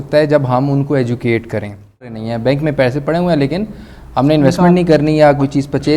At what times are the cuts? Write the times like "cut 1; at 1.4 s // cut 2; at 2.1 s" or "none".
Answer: cut 1; at 2.0 s